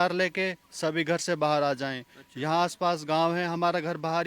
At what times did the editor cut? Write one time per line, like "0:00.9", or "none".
none